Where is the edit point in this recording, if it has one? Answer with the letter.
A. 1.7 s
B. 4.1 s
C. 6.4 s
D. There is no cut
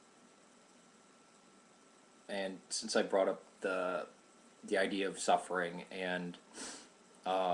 B